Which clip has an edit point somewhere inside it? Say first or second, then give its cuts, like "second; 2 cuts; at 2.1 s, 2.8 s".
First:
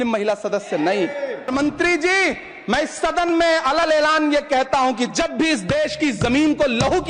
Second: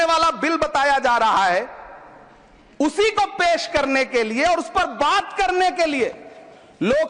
first; 1 cut; at 1.5 s